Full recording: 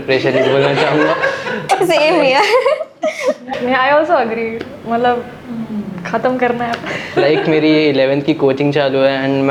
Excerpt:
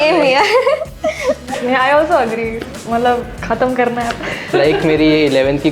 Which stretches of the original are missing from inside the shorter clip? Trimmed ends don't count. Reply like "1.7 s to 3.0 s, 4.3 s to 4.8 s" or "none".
5.3 s to 6.0 s